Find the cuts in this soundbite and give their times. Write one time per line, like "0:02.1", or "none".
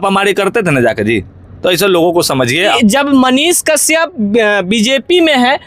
0:02.8